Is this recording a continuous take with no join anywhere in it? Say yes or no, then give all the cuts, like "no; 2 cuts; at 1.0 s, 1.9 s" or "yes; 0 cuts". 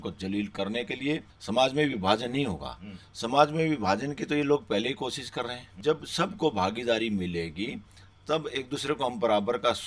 no; 2 cuts; at 1.3 s, 5.6 s